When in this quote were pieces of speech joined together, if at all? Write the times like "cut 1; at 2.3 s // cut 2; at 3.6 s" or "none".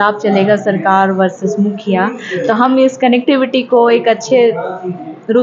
none